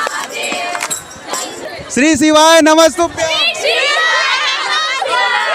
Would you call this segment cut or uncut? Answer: cut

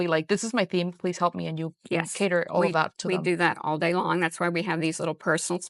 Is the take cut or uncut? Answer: uncut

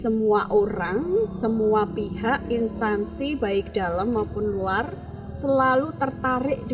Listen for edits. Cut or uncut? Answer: uncut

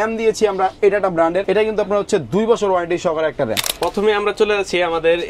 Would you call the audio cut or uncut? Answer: cut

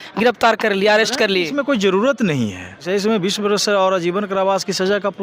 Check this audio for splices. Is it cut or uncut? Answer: cut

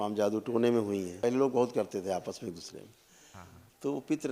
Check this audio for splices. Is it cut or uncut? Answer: cut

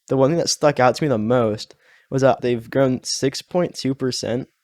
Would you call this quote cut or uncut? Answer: cut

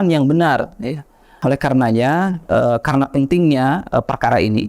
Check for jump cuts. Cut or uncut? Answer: cut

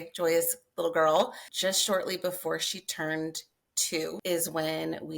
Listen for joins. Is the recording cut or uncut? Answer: cut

